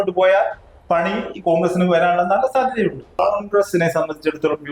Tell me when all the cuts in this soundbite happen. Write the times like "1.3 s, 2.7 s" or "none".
3.2 s